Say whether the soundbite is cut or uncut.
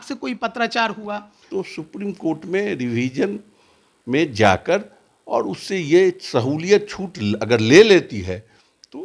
cut